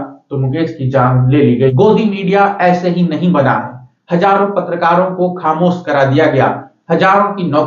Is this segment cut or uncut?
cut